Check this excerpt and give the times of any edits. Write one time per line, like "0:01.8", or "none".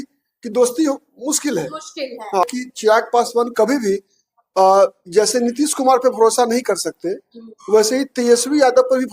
0:02.4